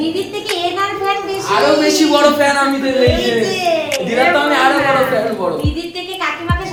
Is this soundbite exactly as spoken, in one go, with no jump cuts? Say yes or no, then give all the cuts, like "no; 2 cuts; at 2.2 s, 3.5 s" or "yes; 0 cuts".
yes; 0 cuts